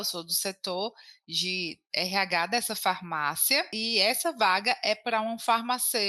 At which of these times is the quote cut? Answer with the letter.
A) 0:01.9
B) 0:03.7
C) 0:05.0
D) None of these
B